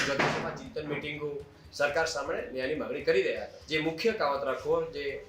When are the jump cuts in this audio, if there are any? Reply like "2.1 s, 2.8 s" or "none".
3.6 s